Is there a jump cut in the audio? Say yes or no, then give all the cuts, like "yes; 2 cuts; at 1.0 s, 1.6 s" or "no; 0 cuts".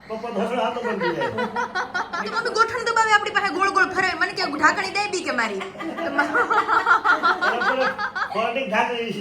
yes; 1 cut; at 2.3 s